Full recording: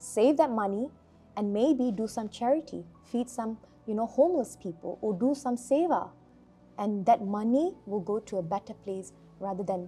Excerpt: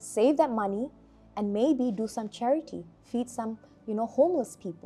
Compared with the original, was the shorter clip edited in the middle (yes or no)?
no